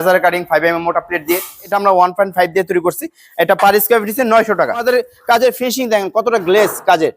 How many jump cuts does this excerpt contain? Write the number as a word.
two